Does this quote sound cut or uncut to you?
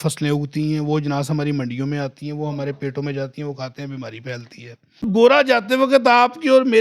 cut